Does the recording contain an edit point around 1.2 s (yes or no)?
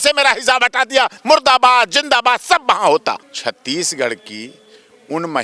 no